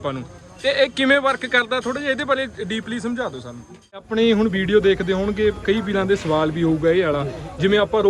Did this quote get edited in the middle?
yes; 1 cut; at 4.1 s

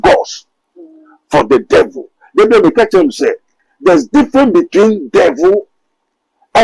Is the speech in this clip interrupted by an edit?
no; 0 cuts

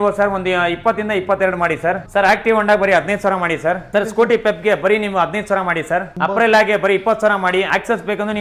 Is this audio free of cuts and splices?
no; 4 cuts; at 2.0 s, 3.8 s, 6.1 s, 7.7 s

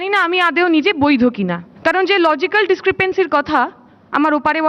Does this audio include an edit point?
yes; 1 cut; at 1.6 s

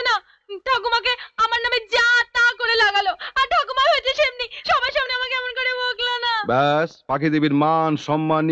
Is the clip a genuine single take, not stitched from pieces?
yes; 0 cuts

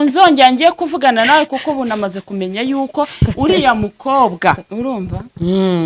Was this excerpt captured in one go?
no; 1 cut; at 4.7 s

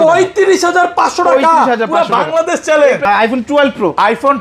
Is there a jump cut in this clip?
yes; 1 cut; at 3.0 s

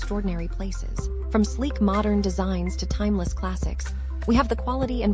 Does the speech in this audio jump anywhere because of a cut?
no; 0 cuts

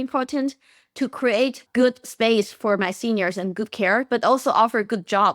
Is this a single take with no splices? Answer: no; 1 cut; at 1.6 s

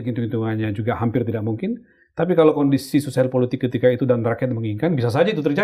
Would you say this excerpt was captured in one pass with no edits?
yes; 0 cuts

